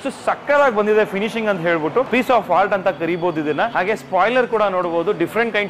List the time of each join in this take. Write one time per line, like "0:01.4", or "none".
0:02.1
0:03.7